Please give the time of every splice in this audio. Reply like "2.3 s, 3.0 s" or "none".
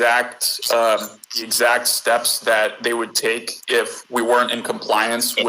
1.4 s